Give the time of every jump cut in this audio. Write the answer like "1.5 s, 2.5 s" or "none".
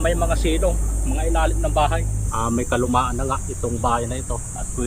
2.2 s